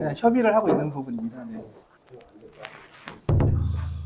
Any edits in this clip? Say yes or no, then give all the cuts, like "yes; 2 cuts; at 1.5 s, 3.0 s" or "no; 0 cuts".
yes; 1 cut; at 1.8 s